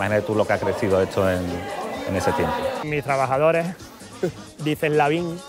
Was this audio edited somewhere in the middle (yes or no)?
yes